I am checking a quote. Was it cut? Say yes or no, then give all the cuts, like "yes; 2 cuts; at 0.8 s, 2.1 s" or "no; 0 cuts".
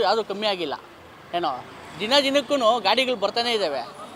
no; 0 cuts